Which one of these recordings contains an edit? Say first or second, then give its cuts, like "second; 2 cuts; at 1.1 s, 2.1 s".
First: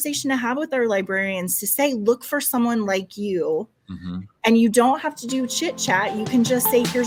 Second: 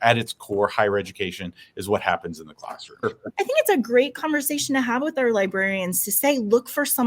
second; 1 cut; at 2.9 s